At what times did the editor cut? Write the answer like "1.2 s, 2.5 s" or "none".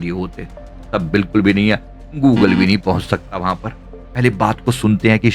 4.0 s